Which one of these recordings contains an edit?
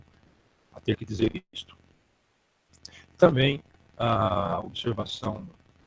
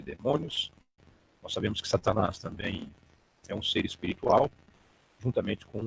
first; 1 cut; at 3.6 s

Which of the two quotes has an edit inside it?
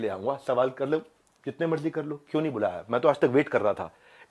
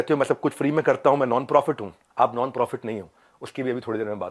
second; 1 cut; at 2.0 s

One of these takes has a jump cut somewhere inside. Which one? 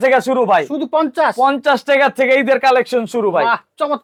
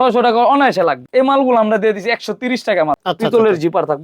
second; 2 cuts; at 1.0 s, 3.0 s

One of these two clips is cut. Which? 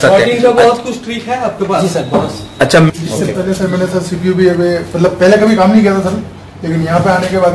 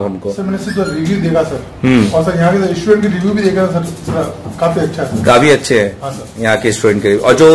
first; 1 cut; at 2.9 s

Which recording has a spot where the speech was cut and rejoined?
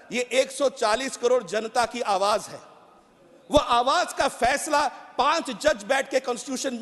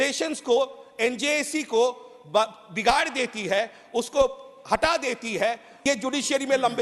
second; 1 cut; at 5.7 s

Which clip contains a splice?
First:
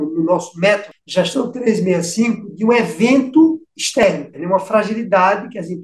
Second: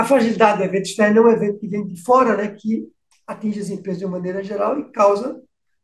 first; 2 cuts; at 1.0 s, 4.0 s

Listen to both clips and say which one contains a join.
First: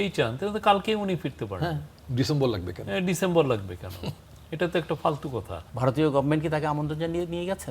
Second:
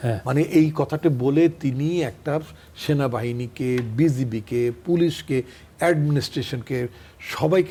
first; 1 cut; at 5.6 s

